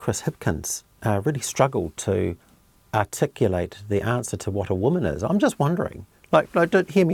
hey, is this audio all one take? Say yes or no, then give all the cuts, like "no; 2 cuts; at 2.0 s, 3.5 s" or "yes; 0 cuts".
yes; 0 cuts